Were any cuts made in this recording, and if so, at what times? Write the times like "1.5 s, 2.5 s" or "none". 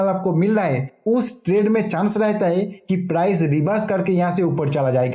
none